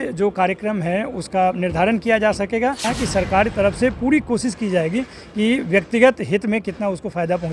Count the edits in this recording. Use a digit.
1